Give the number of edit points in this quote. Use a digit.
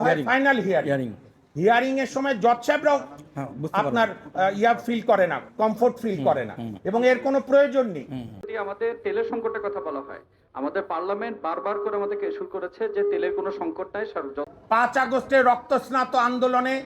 2